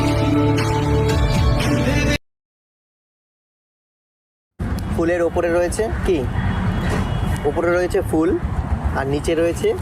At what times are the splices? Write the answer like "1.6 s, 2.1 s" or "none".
none

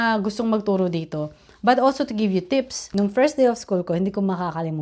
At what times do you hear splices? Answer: 2.8 s

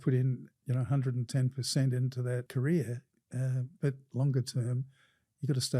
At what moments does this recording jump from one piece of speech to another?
2.5 s, 4.0 s

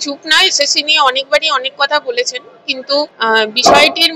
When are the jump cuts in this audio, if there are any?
3.1 s

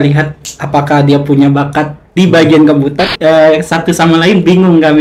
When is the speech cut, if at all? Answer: 3.0 s

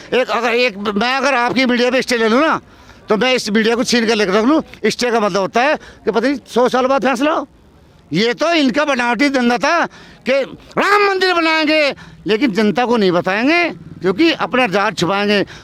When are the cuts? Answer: none

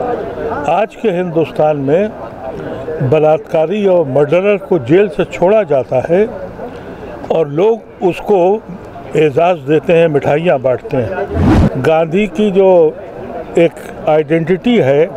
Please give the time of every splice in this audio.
11.5 s

